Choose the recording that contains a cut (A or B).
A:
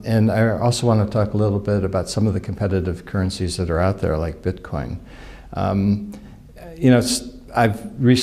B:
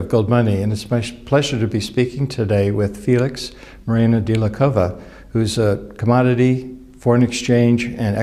A